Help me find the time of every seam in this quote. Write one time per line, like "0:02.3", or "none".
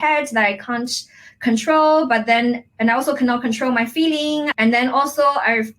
0:02.6
0:04.5